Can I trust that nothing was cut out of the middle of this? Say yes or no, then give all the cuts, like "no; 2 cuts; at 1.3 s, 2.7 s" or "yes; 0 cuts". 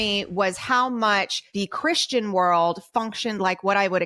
no; 1 cut; at 1.4 s